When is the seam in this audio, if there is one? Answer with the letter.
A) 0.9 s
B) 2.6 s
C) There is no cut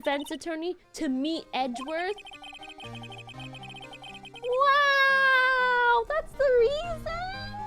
C